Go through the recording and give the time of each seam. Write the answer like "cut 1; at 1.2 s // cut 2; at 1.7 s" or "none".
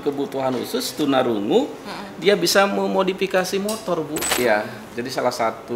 cut 1; at 4.3 s